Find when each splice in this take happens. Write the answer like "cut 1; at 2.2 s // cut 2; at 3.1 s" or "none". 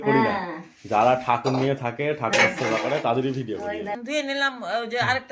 cut 1; at 4.0 s